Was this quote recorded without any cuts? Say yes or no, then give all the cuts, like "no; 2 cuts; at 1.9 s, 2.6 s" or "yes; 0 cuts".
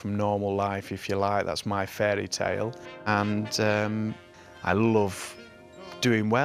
yes; 0 cuts